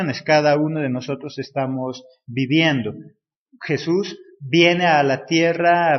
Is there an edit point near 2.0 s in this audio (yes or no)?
no